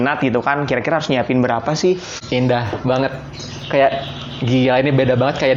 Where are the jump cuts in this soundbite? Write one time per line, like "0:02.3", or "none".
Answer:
0:02.1